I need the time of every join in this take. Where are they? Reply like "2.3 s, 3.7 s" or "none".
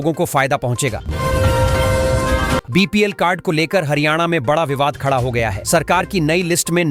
1.1 s, 2.6 s